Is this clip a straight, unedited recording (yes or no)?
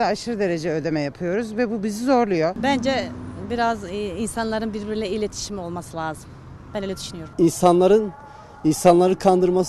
no